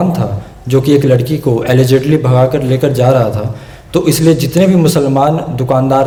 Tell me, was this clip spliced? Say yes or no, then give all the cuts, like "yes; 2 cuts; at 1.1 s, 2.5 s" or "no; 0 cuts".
no; 0 cuts